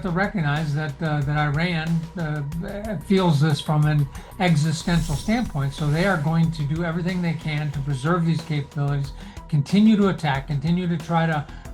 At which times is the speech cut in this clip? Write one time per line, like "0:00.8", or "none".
none